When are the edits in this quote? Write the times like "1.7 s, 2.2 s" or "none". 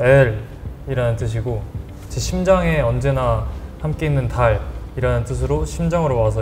none